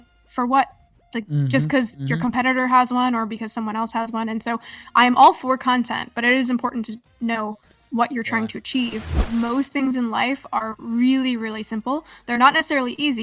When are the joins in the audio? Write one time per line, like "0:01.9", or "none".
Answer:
0:09.2